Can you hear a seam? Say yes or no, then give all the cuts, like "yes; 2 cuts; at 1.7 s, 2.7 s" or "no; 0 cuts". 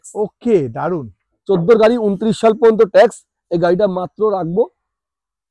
no; 0 cuts